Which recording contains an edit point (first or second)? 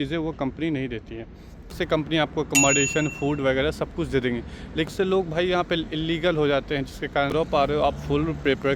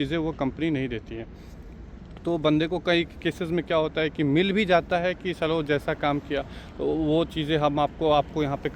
first